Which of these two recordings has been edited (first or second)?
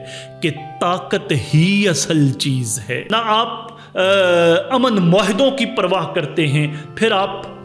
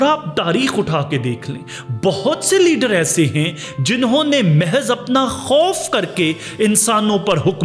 first